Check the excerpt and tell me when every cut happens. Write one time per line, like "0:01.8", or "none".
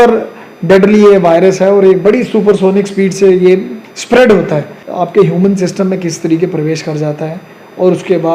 0:04.8